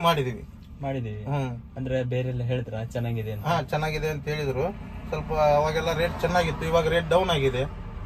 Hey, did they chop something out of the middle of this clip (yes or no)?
no